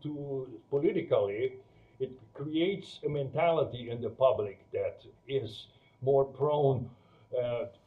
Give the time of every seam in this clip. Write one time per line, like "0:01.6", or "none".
0:05.1

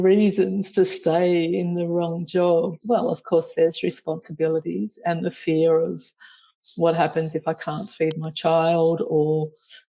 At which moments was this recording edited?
0:02.8

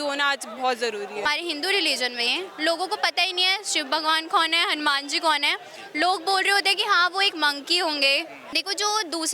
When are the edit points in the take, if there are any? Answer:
0:01.2
0:08.4

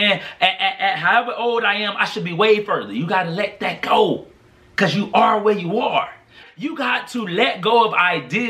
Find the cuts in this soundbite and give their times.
0:06.4

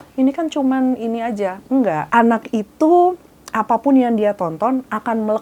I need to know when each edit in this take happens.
0:02.0

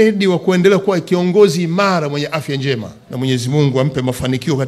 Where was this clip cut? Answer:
0:03.0

